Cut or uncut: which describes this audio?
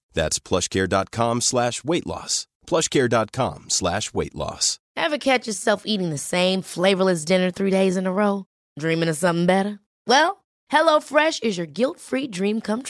cut